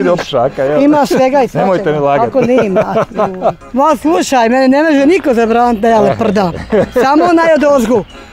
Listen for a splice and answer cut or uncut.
cut